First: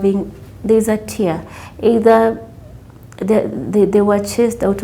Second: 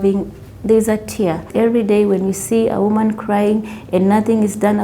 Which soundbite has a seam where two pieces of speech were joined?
second; 1 cut; at 1.5 s

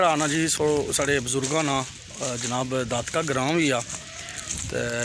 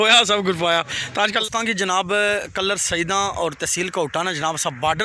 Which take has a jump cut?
second; 1 cut; at 1.4 s

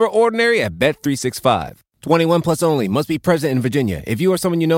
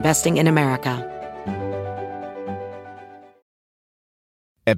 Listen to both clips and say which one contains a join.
second; 1 cut; at 1.0 s

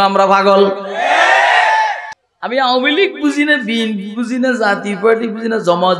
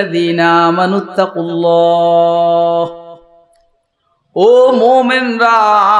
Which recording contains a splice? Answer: first; 1 cut; at 2.1 s

